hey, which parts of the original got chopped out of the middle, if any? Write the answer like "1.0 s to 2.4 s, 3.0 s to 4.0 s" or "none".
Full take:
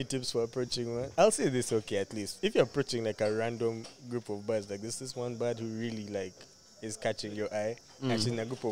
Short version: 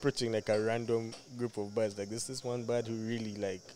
none